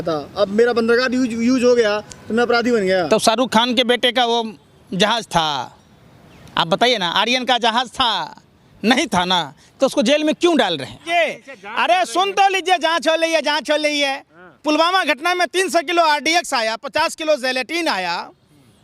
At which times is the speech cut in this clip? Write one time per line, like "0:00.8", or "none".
0:11.0